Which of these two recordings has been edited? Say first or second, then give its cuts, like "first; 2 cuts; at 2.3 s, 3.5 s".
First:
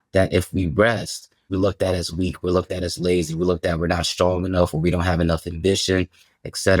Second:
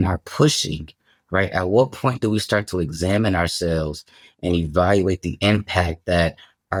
first; 1 cut; at 1.4 s